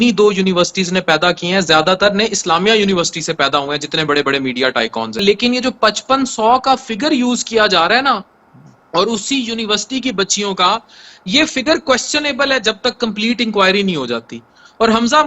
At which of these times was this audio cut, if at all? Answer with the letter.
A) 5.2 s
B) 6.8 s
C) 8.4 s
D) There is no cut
A